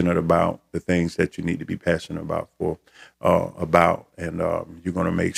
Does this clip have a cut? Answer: no; 0 cuts

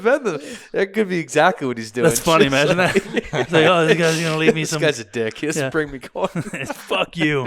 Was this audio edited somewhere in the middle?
no; 0 cuts

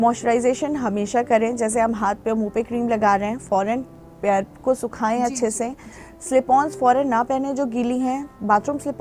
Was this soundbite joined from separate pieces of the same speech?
no; 0 cuts

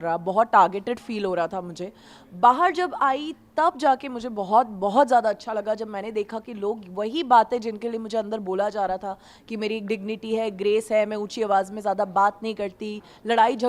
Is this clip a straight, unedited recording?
yes; 0 cuts

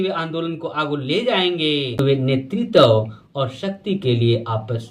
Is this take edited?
yes; 1 cut; at 2.4 s

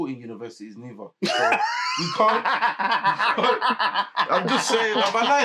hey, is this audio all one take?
yes; 0 cuts

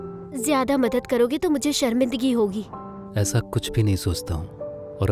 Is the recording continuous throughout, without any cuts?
yes; 0 cuts

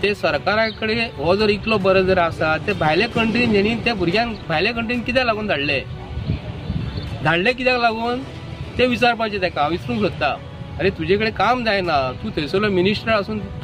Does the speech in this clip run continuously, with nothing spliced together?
yes; 0 cuts

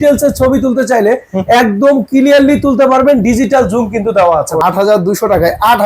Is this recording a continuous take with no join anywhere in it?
no; 1 cut; at 4.6 s

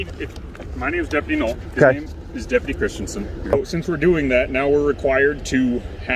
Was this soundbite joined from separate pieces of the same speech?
yes; 1 cut; at 3.5 s

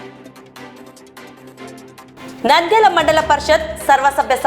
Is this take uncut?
no; 1 cut; at 1.5 s

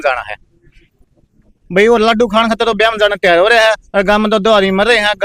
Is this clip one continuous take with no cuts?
yes; 0 cuts

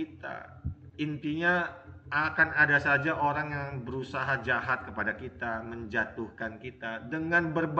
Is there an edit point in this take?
no; 0 cuts

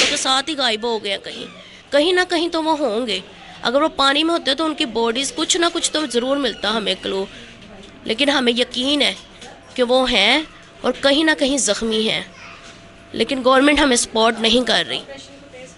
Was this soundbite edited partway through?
no; 0 cuts

